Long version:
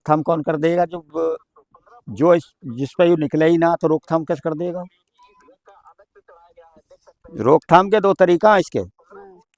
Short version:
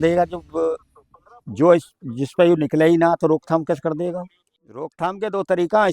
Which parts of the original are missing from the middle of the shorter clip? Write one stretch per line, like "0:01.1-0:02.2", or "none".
0:05.5-0:07.6